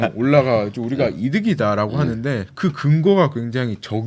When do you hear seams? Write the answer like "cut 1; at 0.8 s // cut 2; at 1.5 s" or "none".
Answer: cut 1; at 2.5 s